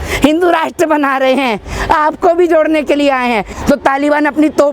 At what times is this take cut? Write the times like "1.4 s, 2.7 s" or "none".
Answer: 3.5 s